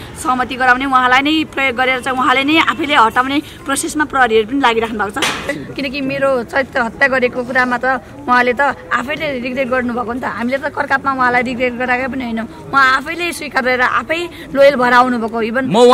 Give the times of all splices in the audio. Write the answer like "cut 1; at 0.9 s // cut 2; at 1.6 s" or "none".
cut 1; at 5.5 s

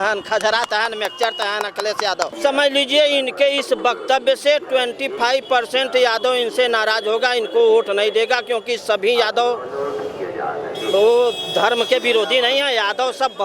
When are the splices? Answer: cut 1; at 2.3 s

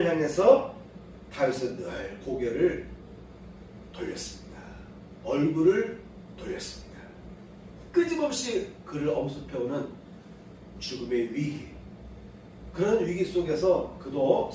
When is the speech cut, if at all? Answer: cut 1; at 7.8 s

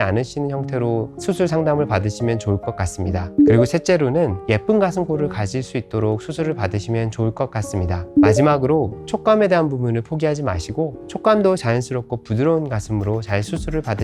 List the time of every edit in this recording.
cut 1; at 4.4 s // cut 2; at 11.0 s

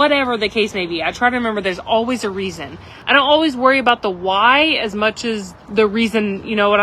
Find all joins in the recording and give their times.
cut 1; at 2.9 s // cut 2; at 5.5 s

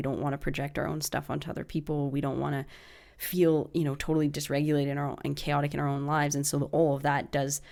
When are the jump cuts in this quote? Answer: none

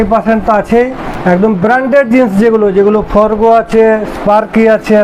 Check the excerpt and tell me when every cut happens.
none

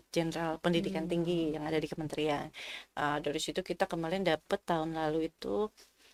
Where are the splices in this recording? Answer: none

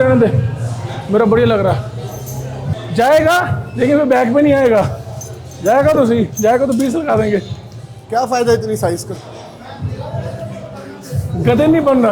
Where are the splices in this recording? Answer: cut 1; at 2.8 s

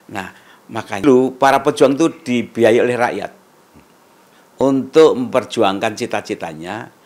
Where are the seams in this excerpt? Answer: cut 1; at 1.0 s

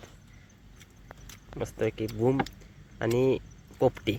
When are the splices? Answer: none

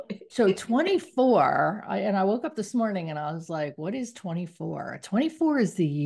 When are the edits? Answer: none

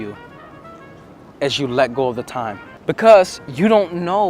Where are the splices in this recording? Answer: cut 1; at 2.7 s

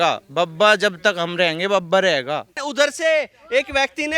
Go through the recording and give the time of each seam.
cut 1; at 2.6 s

